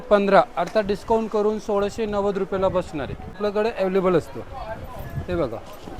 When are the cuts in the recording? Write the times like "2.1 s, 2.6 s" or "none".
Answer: 3.3 s